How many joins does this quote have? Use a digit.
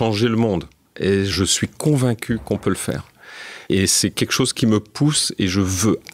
2